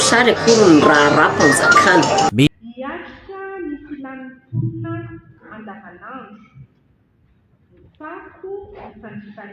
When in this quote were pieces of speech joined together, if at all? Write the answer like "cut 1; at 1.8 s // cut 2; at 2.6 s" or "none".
cut 1; at 2.5 s